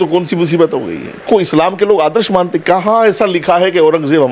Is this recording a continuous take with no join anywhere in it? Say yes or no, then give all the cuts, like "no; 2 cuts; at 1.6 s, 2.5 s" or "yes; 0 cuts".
no; 1 cut; at 1.2 s